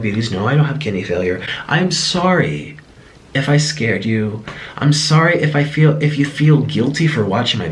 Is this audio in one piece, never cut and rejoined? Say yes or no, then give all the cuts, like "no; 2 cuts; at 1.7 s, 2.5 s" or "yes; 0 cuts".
yes; 0 cuts